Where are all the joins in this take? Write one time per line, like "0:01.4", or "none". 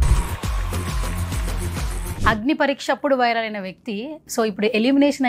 0:02.2